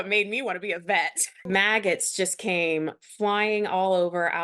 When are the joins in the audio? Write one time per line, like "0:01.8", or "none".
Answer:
0:01.5